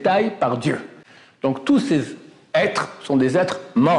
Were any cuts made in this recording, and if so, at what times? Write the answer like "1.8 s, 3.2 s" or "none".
none